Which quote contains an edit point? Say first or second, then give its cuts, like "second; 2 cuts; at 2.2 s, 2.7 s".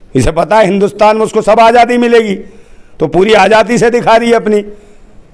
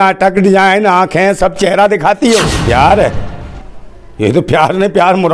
second; 1 cut; at 2.5 s